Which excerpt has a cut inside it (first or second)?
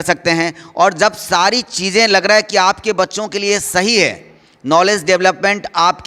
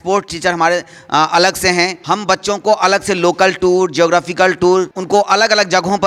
second